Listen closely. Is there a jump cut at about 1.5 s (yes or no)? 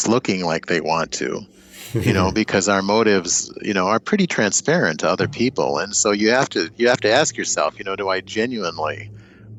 no